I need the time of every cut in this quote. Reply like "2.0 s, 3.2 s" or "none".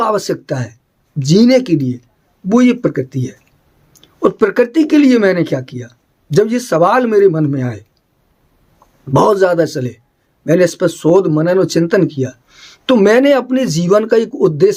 none